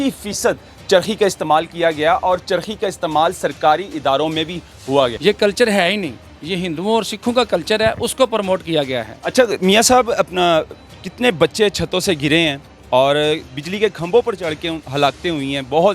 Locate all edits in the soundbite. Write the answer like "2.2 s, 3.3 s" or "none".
5.2 s